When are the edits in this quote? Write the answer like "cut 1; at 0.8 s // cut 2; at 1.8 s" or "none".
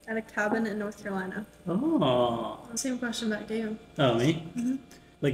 cut 1; at 2.7 s